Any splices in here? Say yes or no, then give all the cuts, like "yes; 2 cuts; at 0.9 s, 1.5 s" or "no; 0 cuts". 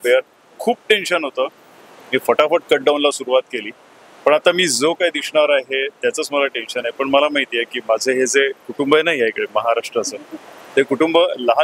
no; 0 cuts